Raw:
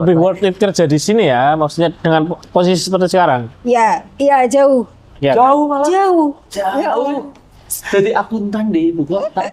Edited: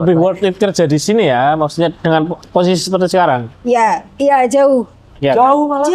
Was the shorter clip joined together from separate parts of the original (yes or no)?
no